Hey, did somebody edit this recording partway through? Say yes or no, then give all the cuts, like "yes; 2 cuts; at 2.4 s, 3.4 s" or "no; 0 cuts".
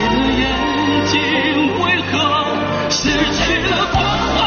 no; 0 cuts